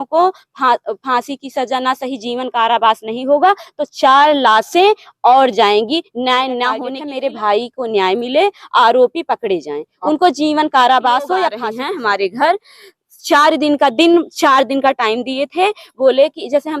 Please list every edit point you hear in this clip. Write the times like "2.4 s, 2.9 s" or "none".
7.0 s, 11.6 s